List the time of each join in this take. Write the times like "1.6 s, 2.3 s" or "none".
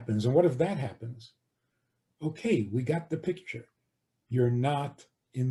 none